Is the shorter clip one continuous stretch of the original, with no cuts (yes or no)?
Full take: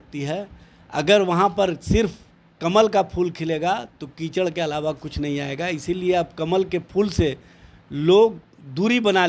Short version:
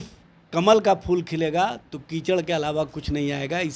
yes